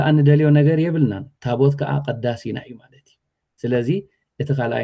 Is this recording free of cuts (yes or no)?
yes